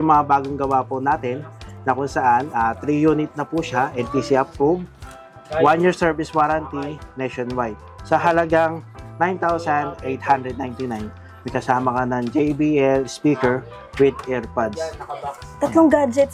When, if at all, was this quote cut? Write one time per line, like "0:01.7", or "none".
none